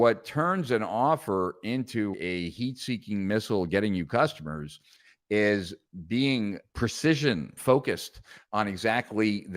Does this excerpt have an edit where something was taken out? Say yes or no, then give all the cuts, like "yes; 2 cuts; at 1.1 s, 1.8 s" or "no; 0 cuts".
yes; 2 cuts; at 6.6 s, 7.6 s